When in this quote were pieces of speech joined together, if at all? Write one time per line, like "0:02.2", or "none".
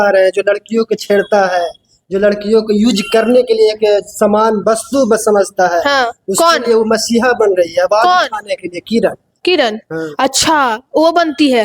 none